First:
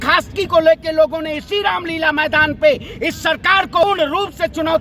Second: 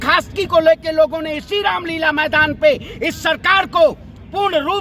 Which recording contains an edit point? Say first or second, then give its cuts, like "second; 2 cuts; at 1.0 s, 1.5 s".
first; 1 cut; at 3.8 s